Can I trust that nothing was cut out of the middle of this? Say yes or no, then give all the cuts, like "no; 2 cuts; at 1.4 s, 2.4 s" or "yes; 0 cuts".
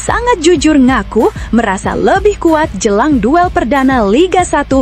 yes; 0 cuts